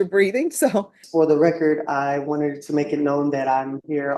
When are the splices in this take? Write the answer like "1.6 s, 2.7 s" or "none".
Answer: 1.0 s